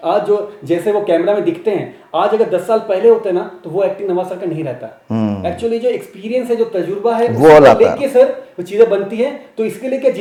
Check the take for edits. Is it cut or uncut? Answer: uncut